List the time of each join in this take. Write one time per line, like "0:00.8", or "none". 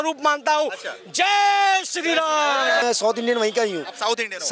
0:02.8

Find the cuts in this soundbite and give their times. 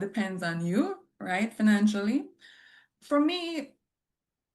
none

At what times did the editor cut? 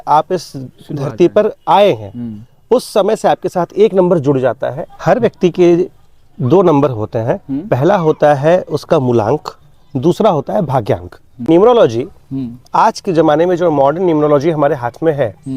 0:04.9
0:11.5

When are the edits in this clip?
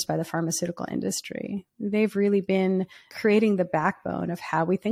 0:03.0

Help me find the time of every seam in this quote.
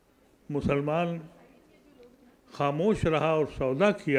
none

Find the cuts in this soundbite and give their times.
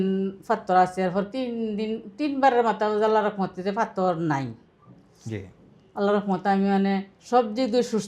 none

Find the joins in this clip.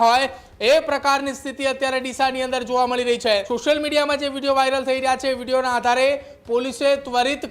0:03.5

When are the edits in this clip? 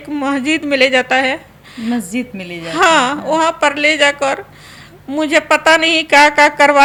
none

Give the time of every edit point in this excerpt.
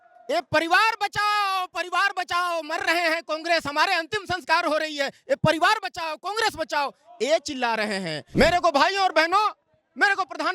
0:08.2

